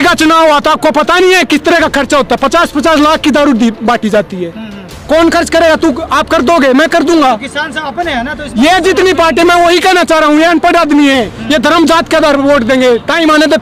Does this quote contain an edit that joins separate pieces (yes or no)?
no